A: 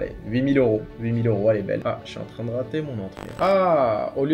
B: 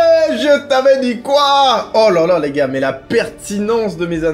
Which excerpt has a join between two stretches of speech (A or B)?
A